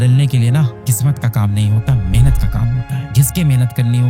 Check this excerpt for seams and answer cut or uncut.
cut